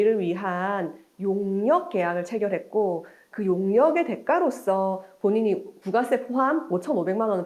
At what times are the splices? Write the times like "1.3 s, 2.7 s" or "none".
none